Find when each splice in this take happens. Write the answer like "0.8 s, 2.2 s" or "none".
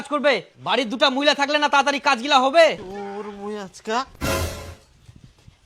2.9 s